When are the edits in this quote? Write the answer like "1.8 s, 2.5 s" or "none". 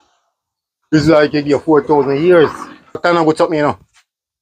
3.0 s